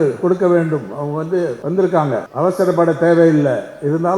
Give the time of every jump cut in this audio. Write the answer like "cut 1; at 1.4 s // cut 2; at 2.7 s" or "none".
cut 1; at 1.6 s // cut 2; at 2.3 s

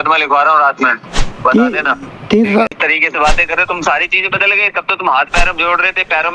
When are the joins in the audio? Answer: cut 1; at 2.8 s

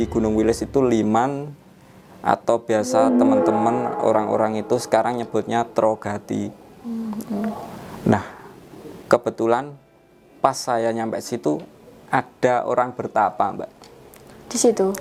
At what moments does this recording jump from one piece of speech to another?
none

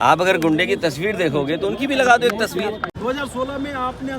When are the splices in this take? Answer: cut 1; at 2.9 s

